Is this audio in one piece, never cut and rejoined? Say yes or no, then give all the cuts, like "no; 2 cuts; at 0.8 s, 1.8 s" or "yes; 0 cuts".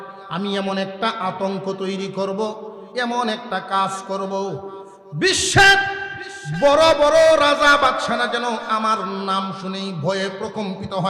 yes; 0 cuts